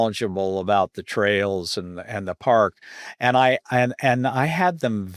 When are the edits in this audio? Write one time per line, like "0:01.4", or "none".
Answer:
none